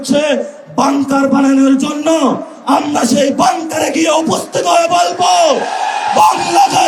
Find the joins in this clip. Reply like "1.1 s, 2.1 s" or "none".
none